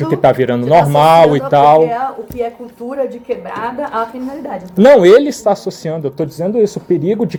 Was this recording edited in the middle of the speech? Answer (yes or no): no